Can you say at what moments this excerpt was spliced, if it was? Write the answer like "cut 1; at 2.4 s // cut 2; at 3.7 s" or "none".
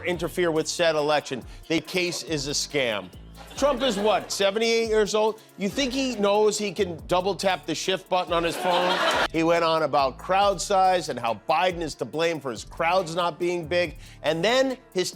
cut 1; at 1.9 s // cut 2; at 9.3 s